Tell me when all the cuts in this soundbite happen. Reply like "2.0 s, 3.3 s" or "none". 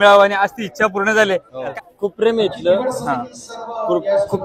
1.7 s